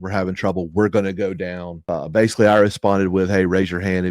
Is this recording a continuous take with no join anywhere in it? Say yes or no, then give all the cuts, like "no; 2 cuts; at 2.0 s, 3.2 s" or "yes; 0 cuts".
no; 1 cut; at 1.7 s